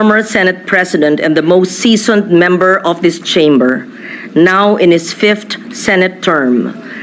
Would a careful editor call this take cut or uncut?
uncut